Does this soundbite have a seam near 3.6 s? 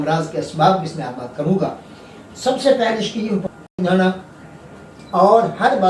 yes; 1 cut; at 3.6 s

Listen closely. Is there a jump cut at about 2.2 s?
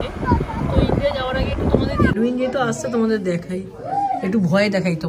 yes; 1 cut; at 2.2 s

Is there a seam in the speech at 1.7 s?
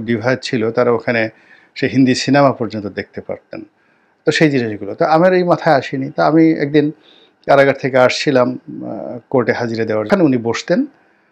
no; 1 cut; at 10.1 s

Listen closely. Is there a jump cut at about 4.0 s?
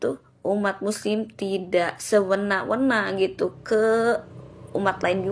no; 0 cuts

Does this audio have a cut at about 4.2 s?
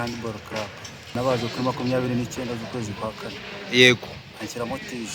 no; 1 cut; at 1.1 s

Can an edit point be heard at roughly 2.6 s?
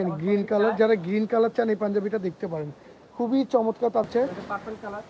no; 1 cut; at 4.0 s

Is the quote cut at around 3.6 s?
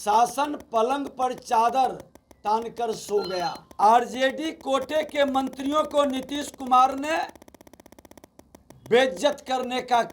yes; 1 cut; at 3.6 s

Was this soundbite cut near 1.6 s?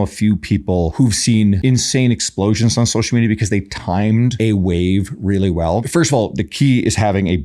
yes; 4 cuts; at 0.9 s, 1.6 s, 4.3 s, 5.8 s

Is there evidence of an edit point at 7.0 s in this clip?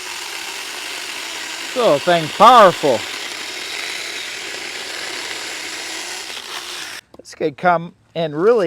yes; 1 cut; at 7.0 s

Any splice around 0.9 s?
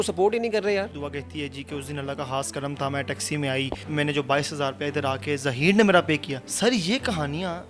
yes; 3 cuts; at 0.9 s, 3.8 s, 6.4 s

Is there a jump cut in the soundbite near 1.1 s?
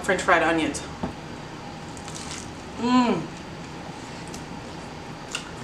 yes; 1 cut; at 1.1 s

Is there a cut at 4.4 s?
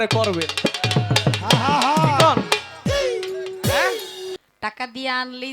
yes; 1 cut; at 4.4 s

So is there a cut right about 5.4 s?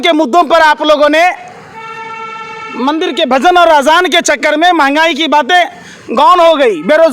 no; 0 cuts

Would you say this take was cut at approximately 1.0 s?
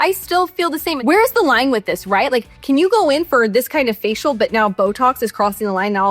yes; 1 cut; at 1.0 s

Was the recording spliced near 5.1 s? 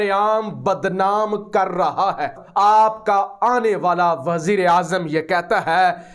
no; 1 cut; at 2.3 s

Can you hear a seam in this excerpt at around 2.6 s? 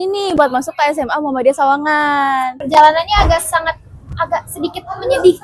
yes; 1 cut; at 2.6 s

